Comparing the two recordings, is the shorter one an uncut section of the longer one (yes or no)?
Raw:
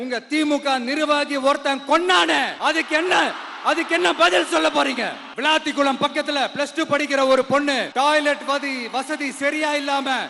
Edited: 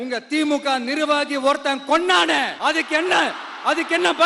yes